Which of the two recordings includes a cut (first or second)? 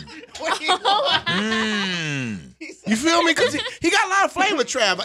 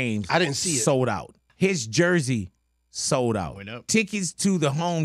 second